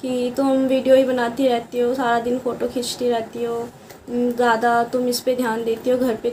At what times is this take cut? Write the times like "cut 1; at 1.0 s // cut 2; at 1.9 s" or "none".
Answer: none